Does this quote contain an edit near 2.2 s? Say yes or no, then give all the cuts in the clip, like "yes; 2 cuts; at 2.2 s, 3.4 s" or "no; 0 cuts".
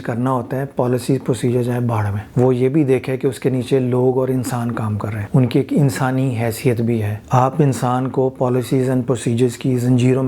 yes; 3 cuts; at 2.2 s, 5.1 s, 7.2 s